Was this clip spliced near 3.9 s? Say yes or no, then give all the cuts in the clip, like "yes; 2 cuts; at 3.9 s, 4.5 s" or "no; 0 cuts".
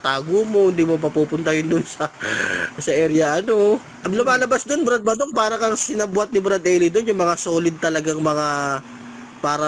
yes; 1 cut; at 3.9 s